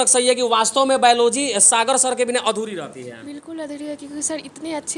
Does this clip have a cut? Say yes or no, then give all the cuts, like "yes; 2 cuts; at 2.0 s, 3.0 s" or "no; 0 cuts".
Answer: no; 0 cuts